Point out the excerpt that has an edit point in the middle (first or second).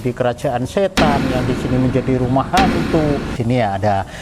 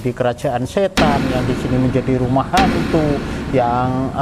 first